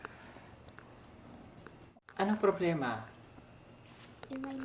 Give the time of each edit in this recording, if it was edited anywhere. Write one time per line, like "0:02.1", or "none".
0:01.9